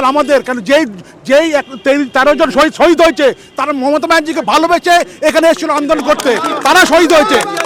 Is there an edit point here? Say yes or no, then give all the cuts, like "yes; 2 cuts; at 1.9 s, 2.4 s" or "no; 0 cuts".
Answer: no; 0 cuts